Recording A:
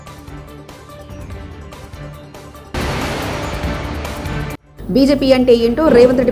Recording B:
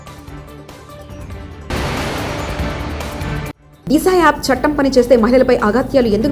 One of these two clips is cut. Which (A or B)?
B